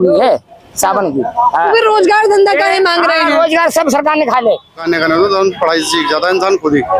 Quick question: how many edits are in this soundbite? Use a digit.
1